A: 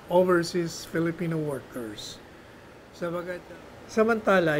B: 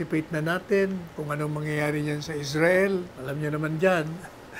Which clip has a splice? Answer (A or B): A